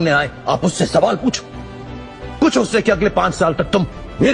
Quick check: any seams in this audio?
no; 0 cuts

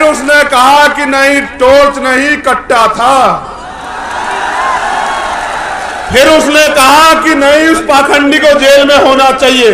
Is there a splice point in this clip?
no; 0 cuts

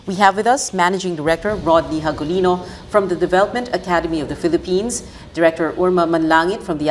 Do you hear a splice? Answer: yes; 1 cut; at 4.7 s

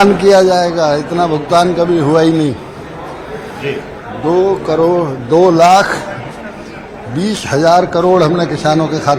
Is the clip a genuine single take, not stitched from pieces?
yes; 0 cuts

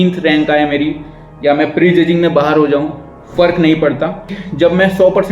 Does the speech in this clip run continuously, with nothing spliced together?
no; 1 cut; at 4.4 s

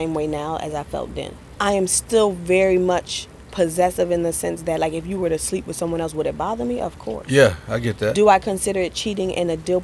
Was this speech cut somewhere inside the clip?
yes; 1 cut; at 1.4 s

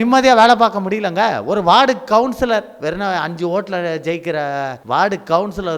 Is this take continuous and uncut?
no; 1 cut; at 4.8 s

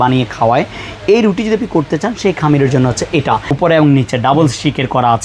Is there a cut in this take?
yes; 1 cut; at 3.5 s

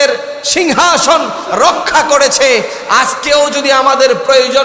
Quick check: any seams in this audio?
no; 0 cuts

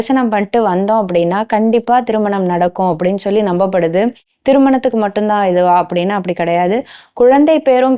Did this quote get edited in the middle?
no; 0 cuts

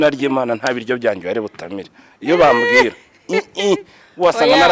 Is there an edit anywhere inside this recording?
no; 0 cuts

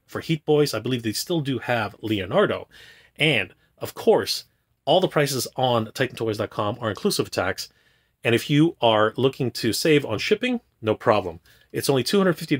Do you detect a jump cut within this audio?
no; 0 cuts

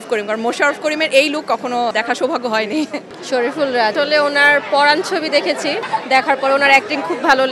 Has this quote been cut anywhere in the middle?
yes; 4 cuts; at 1.9 s, 3.1 s, 3.9 s, 5.8 s

